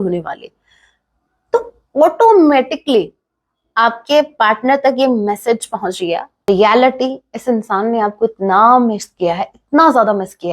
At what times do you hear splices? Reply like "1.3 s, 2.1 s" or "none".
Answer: 6.4 s